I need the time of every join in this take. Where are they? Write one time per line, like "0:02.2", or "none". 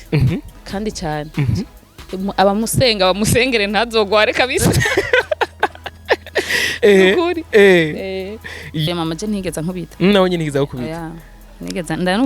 0:08.8